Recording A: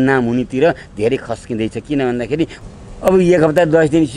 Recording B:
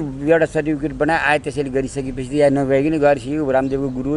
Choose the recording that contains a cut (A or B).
A